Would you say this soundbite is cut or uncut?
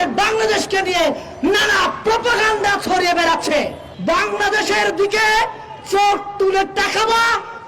cut